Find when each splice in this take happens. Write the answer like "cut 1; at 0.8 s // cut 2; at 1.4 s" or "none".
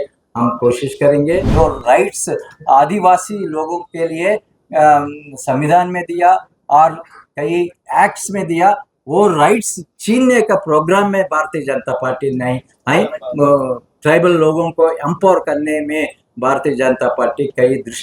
cut 1; at 1.5 s